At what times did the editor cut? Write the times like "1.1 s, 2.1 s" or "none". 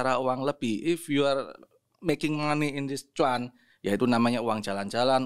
none